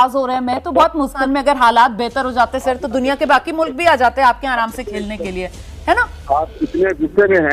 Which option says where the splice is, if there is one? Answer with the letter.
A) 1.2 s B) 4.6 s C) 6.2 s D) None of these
A